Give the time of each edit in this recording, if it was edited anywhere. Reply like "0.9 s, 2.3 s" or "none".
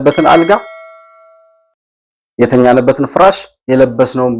none